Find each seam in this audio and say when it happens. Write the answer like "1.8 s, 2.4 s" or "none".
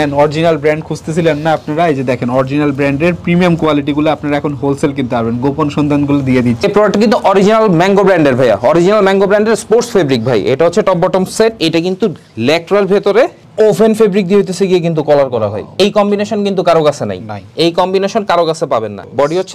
6.6 s, 11.6 s

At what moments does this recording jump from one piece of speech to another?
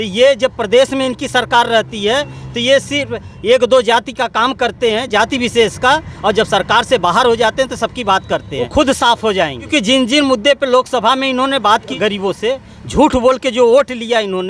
8.7 s, 9.7 s, 11.9 s

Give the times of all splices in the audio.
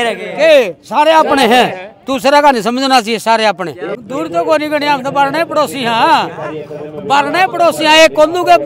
3.9 s

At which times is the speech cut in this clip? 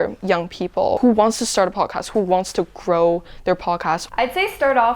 4.0 s

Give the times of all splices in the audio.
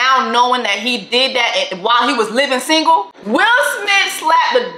3.2 s

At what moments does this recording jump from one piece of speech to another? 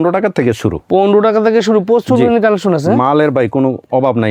none

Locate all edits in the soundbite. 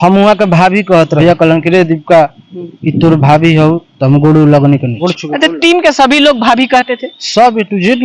1.2 s, 4.9 s

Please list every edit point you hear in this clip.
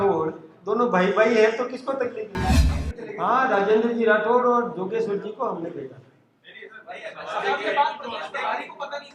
2.6 s

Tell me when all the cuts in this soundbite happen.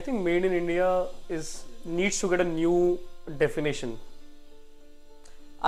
none

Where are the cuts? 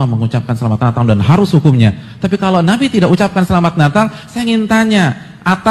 none

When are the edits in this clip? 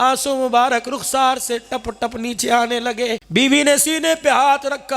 3.2 s

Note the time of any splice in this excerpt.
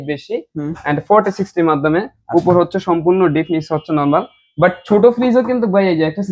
none

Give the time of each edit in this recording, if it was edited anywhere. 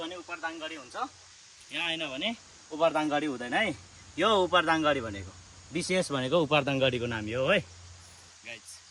none

